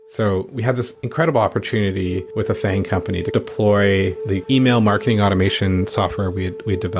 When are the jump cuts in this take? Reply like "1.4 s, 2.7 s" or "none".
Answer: 1.0 s, 2.3 s